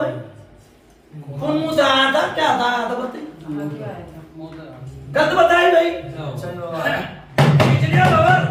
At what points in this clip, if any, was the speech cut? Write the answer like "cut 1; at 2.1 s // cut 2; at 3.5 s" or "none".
none